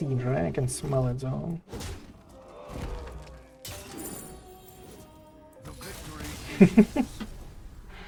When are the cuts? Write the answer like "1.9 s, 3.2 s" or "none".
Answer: none